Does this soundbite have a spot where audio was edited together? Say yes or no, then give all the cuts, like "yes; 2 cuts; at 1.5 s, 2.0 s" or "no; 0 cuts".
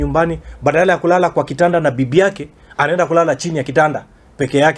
no; 0 cuts